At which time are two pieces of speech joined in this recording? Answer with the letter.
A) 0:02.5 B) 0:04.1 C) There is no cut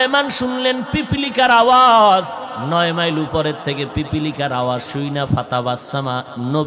A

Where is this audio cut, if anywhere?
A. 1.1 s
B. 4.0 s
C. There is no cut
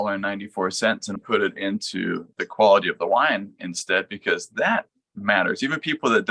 A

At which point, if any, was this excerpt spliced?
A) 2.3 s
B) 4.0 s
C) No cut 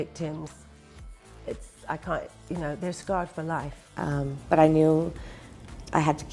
B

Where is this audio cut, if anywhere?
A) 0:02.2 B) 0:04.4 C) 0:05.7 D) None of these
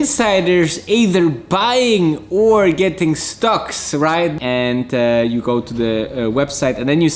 B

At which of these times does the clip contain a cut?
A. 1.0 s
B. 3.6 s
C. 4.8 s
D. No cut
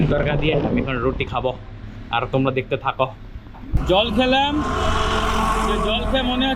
B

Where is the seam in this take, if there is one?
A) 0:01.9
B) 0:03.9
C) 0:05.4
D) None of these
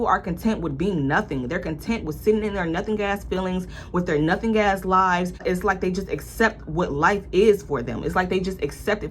C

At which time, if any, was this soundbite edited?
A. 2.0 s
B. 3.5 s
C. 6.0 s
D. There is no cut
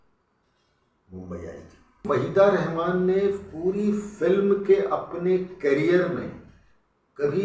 A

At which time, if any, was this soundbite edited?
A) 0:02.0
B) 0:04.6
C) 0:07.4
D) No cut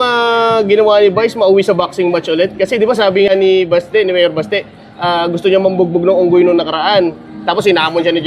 D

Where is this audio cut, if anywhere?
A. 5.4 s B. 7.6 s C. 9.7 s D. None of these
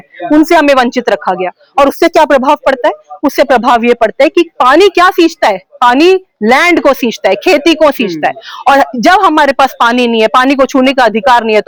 D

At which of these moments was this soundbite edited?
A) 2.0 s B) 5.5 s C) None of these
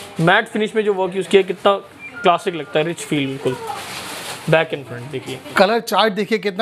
B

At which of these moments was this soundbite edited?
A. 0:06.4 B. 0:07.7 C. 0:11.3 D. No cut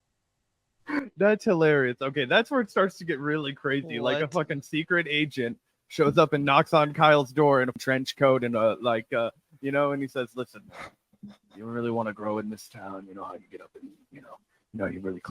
B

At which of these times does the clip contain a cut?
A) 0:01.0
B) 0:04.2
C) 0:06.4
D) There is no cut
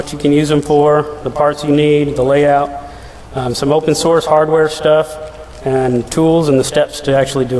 C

